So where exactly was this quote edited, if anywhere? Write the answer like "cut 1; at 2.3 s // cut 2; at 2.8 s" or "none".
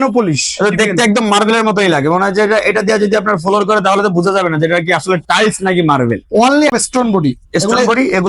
cut 1; at 6.8 s